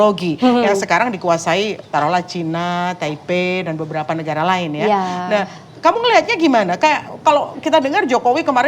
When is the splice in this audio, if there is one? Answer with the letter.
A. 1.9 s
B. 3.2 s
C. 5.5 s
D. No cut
D